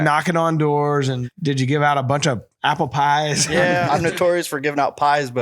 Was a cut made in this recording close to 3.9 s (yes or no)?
yes